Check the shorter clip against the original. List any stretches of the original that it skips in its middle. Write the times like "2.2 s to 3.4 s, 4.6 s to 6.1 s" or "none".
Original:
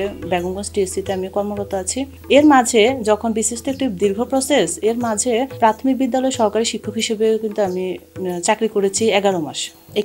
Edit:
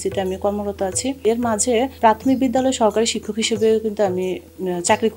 2.1 s to 4.8 s